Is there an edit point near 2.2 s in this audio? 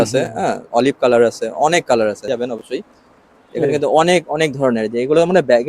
yes; 1 cut; at 2.2 s

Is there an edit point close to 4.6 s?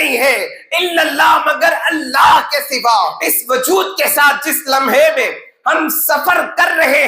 no; 1 cut; at 3.2 s

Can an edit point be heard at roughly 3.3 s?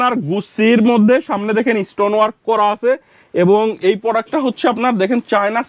no; 0 cuts

